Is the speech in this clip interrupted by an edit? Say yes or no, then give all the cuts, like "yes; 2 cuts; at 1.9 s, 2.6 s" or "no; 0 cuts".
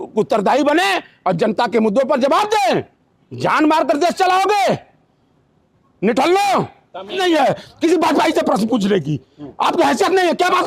yes; 1 cut; at 7.0 s